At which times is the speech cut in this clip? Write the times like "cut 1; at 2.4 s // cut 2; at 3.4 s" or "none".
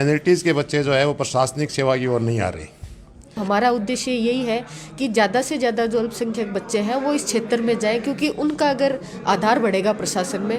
cut 1; at 3.4 s

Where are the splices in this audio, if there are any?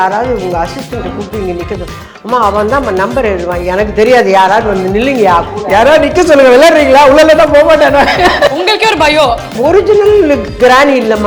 cut 1; at 9.6 s

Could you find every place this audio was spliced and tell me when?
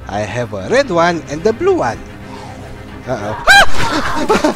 none

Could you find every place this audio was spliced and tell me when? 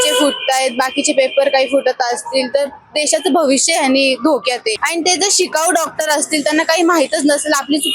cut 1; at 4.8 s

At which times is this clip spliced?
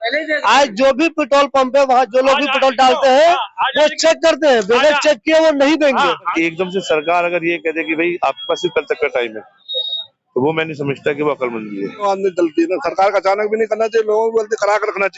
cut 1; at 6.3 s // cut 2; at 12.0 s

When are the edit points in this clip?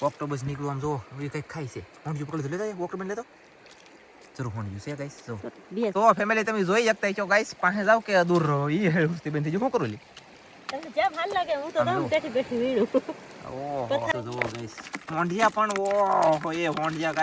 cut 1; at 5.9 s // cut 2; at 14.1 s

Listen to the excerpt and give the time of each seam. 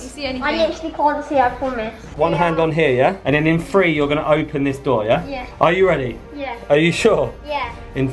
cut 1; at 2.1 s

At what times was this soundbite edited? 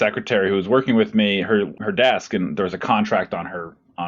cut 1; at 1.7 s

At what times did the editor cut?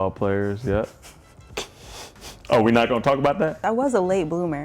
cut 1; at 3.6 s

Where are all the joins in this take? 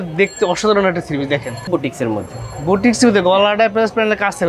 cut 1; at 1.7 s

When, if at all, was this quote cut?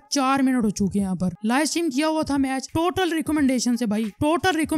cut 1; at 2.6 s

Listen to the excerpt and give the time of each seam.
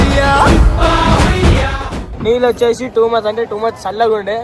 cut 1; at 2.1 s

